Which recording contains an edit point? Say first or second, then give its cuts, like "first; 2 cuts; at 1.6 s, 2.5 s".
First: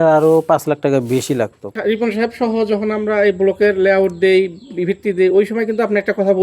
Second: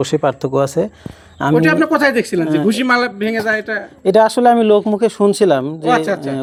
first; 1 cut; at 1.7 s